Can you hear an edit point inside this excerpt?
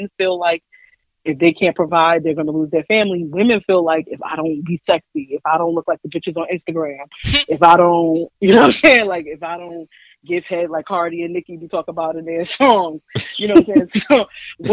no; 0 cuts

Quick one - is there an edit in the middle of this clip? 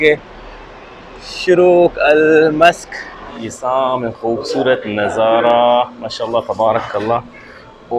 yes; 1 cut; at 2.9 s

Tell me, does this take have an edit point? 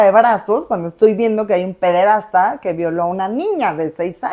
no; 0 cuts

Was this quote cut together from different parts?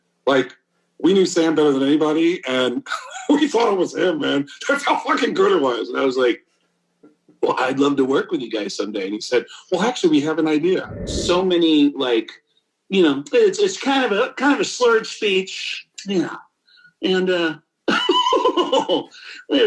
yes; 1 cut; at 11.1 s

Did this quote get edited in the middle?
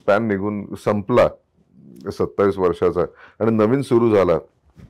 no; 0 cuts

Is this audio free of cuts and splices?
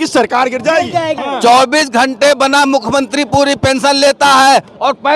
no; 1 cut; at 1.2 s

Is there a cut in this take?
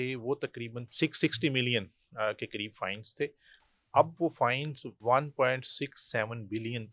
yes; 1 cut; at 5.0 s

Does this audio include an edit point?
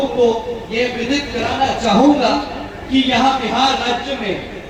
no; 0 cuts

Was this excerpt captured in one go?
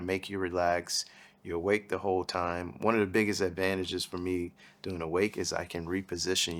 yes; 0 cuts

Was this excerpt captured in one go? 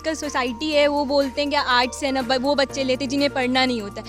yes; 0 cuts

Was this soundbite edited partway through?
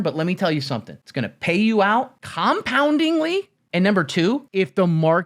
yes; 4 cuts; at 1.0 s, 2.2 s, 3.6 s, 4.5 s

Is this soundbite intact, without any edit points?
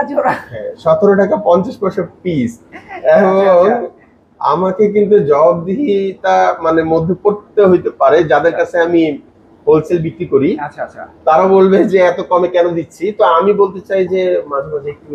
yes; 0 cuts

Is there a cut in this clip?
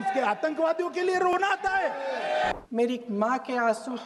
yes; 1 cut; at 2.5 s

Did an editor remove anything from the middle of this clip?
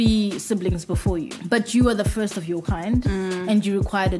yes; 1 cut; at 1.3 s

